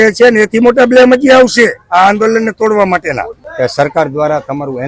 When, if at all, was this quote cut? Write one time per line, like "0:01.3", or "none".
0:03.4